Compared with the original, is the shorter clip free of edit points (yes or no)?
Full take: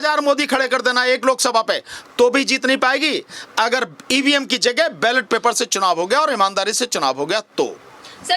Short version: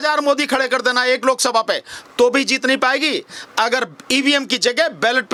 yes